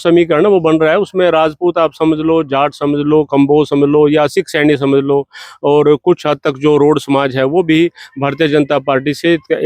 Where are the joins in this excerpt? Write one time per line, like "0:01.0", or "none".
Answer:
none